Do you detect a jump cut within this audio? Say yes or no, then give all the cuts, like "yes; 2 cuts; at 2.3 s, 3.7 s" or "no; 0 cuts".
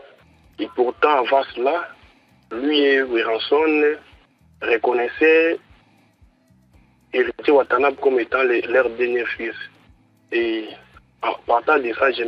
no; 0 cuts